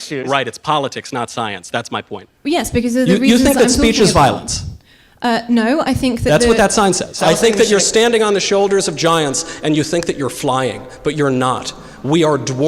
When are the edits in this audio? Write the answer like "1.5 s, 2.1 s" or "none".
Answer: 2.2 s, 7.2 s